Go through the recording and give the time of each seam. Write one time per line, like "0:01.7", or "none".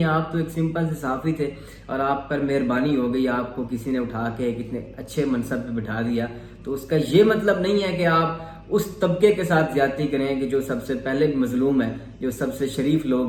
none

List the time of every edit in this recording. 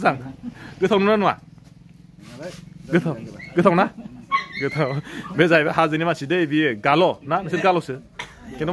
none

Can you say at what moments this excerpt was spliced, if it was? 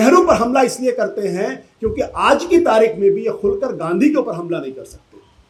none

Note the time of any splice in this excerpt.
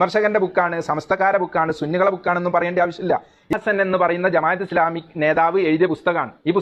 0:03.5

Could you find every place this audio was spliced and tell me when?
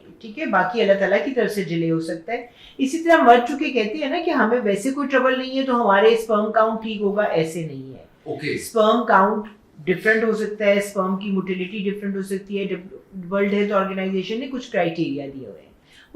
none

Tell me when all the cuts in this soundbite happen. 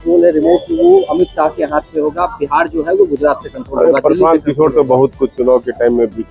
none

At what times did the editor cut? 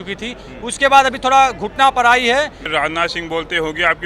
0:02.6

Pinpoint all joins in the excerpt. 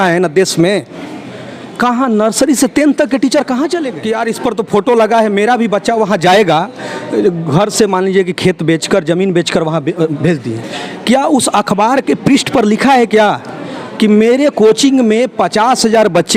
0:03.9

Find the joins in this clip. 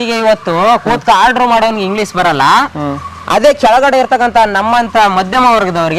none

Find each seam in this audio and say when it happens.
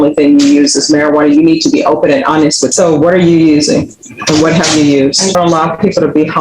0:02.7
0:05.3

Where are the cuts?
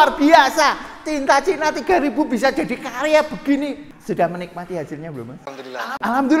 0:03.8

